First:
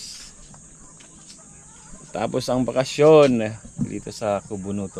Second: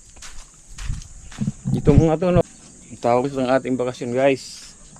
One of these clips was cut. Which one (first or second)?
second